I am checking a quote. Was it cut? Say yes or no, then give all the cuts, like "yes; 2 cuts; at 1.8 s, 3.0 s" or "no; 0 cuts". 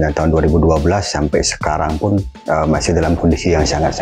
no; 0 cuts